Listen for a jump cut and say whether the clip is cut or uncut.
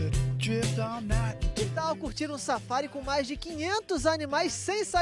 cut